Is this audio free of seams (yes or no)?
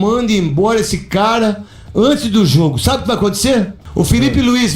no